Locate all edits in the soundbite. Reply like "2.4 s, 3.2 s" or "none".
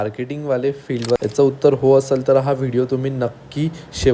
1.2 s